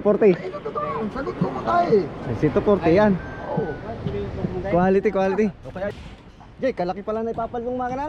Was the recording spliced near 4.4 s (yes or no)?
no